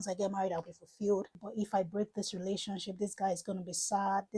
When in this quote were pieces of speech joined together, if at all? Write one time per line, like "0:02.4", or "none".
0:01.4